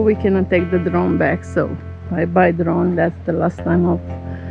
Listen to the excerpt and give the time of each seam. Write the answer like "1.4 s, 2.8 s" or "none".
none